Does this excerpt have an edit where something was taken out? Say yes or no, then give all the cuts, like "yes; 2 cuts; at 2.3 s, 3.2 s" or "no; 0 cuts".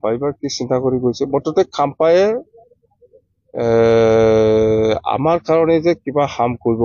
no; 0 cuts